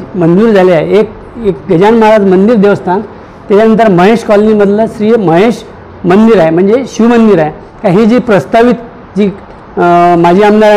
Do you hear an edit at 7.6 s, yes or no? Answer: yes